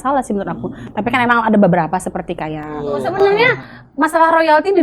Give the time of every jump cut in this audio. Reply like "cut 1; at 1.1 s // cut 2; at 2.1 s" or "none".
cut 1; at 2.8 s